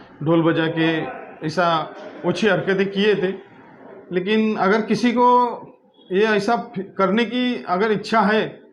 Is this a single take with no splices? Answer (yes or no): no